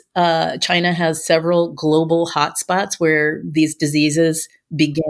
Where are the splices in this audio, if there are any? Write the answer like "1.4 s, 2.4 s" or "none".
none

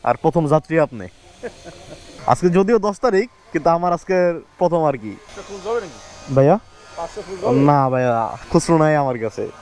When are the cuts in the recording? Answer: none

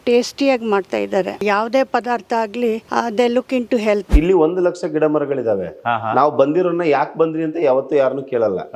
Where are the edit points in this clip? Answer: 1.3 s, 2.8 s, 4.1 s

